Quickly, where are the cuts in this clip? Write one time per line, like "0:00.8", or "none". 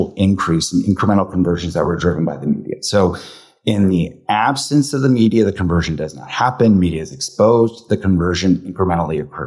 none

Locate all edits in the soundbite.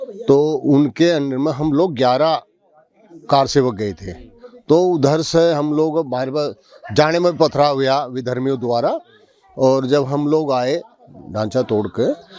none

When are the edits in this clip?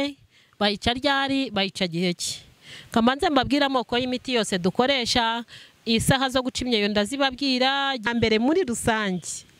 0:08.1

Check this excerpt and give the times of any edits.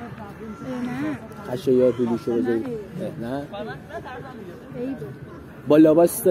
none

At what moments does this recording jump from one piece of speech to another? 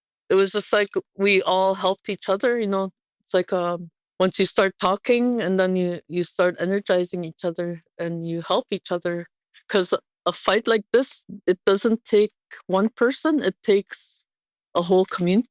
none

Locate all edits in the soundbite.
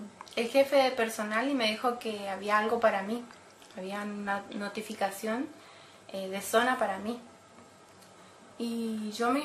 none

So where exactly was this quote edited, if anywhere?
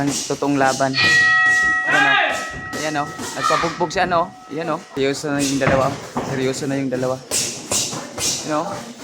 0:04.9

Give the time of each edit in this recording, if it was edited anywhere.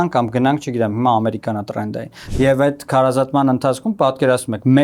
0:02.2

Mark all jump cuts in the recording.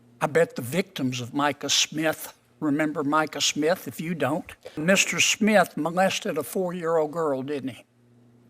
0:04.8

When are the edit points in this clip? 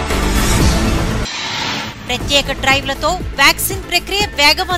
0:01.1

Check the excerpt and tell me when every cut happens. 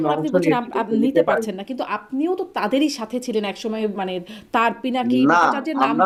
none

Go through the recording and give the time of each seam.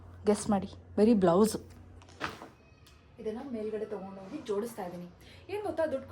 0:02.3

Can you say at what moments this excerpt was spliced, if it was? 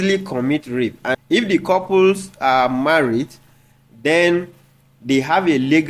0:01.2

